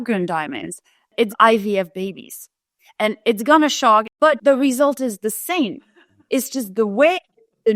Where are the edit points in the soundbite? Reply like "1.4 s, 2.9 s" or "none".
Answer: 1.2 s, 4.2 s